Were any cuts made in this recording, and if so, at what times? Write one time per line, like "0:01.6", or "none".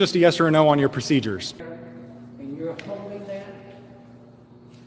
0:01.5